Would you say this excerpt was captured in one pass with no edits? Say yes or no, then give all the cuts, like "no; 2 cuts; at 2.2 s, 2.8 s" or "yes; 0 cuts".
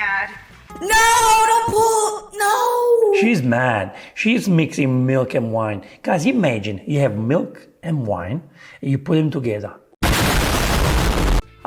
yes; 0 cuts